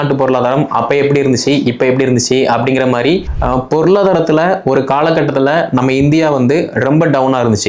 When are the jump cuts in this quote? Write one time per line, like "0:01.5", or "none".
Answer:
0:03.3